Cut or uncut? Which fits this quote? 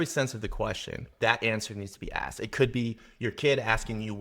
cut